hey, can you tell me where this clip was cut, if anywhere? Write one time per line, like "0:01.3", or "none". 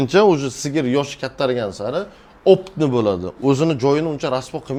none